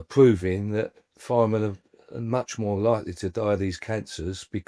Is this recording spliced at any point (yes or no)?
no